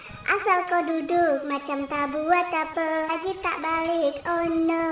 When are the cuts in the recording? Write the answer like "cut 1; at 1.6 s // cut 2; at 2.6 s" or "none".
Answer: cut 1; at 3.1 s